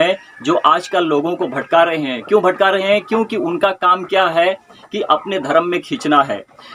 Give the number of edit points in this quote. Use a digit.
0